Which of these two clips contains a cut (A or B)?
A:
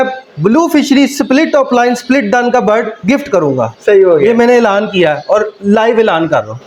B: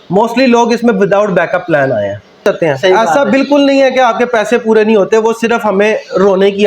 B